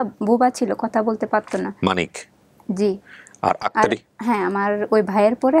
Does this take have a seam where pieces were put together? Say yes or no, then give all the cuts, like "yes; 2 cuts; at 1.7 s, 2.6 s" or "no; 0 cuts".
no; 0 cuts